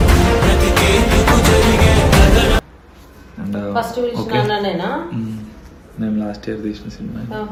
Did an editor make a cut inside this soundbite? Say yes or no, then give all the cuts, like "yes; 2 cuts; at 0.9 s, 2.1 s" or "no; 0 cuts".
no; 0 cuts